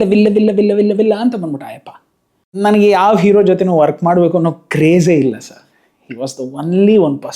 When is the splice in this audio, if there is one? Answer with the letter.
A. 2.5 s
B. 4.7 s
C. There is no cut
A